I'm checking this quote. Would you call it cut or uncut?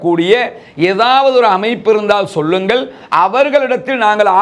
uncut